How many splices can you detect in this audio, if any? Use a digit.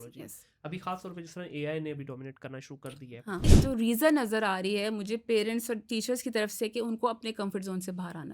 1